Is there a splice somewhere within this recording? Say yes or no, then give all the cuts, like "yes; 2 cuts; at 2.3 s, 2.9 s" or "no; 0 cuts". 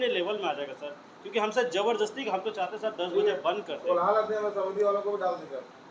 no; 0 cuts